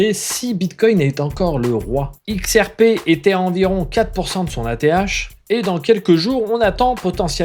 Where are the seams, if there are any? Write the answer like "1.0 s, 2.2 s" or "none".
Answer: 2.2 s